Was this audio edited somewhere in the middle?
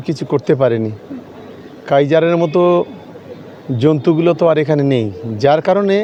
no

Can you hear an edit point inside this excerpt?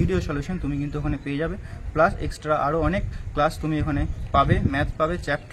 no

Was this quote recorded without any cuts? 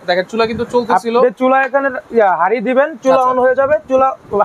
yes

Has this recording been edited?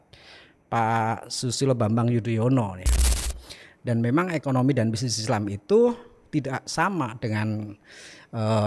yes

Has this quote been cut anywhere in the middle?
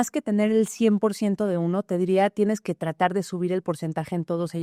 no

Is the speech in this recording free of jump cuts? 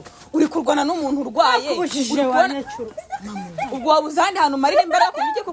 yes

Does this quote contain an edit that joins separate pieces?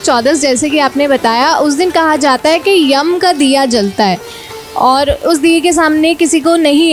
no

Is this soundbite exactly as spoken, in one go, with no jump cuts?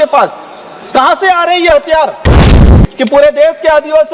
no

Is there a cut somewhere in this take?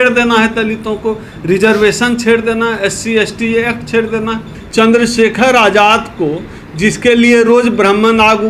yes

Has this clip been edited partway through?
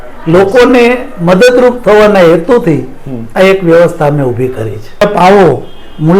yes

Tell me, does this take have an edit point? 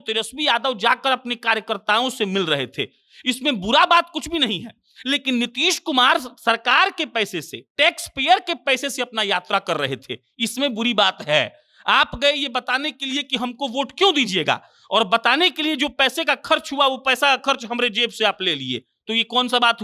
no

